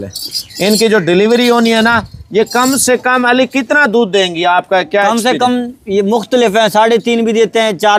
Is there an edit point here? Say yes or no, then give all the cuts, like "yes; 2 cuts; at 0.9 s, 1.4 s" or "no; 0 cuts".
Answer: no; 0 cuts